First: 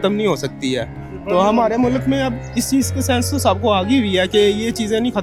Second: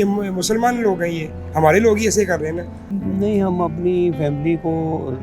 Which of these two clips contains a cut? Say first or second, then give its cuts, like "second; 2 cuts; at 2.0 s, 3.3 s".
second; 1 cut; at 2.8 s